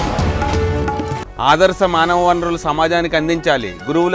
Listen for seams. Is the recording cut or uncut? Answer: cut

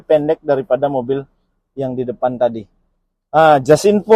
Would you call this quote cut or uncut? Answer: uncut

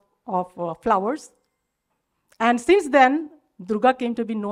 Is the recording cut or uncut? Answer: uncut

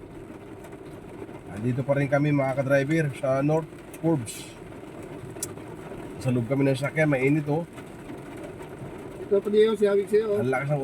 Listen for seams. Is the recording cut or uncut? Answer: uncut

